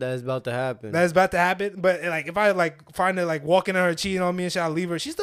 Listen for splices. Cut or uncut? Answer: uncut